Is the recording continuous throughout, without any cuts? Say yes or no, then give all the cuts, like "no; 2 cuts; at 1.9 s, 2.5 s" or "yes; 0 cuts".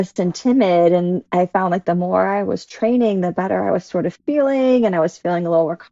yes; 0 cuts